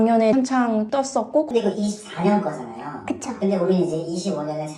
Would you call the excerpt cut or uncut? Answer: cut